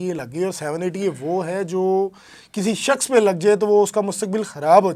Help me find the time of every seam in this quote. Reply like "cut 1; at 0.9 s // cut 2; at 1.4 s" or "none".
none

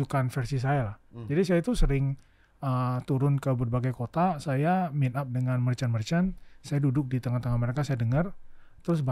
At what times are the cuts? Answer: none

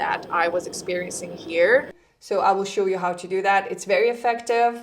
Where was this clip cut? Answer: cut 1; at 1.9 s

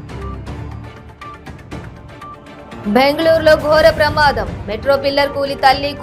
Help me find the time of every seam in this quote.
cut 1; at 1.6 s

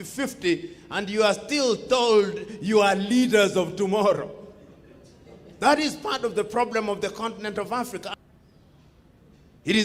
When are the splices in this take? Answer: cut 1; at 8.1 s

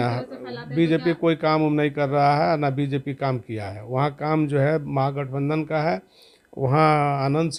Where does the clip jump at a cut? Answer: none

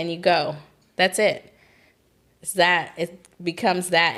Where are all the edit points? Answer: none

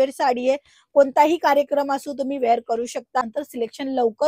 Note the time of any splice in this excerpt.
cut 1; at 3.2 s

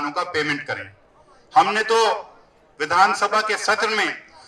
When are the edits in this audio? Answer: none

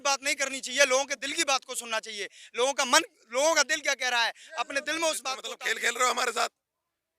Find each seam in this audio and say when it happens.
cut 1; at 5.5 s

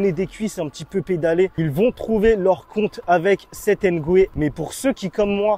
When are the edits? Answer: cut 1; at 1.5 s // cut 2; at 4.3 s

